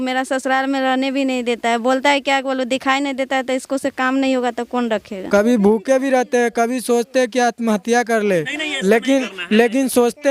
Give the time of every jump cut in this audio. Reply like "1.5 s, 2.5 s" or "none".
5.1 s